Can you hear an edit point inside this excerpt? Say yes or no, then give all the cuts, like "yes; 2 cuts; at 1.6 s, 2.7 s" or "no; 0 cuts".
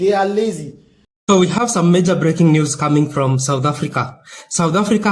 yes; 1 cut; at 1.1 s